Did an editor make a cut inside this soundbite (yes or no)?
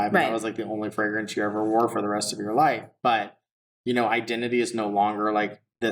no